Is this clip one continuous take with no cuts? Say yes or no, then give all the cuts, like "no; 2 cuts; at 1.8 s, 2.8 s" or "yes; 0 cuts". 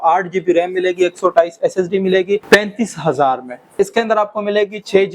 no; 2 cuts; at 2.4 s, 3.8 s